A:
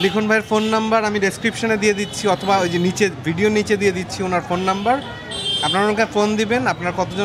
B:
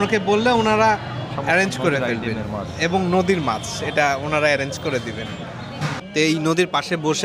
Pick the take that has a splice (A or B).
B